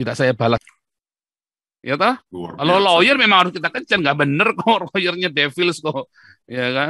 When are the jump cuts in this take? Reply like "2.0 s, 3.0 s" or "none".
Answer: none